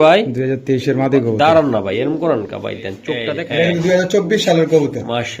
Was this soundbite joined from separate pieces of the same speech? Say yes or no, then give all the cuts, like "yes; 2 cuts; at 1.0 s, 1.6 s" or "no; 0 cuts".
yes; 1 cut; at 3.4 s